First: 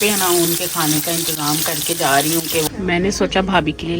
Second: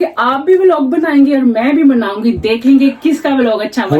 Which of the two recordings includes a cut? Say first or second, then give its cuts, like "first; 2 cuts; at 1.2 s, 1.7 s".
first; 1 cut; at 2.6 s